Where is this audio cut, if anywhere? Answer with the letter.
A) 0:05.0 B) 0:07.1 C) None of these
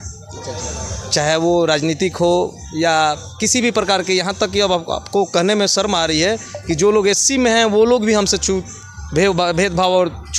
C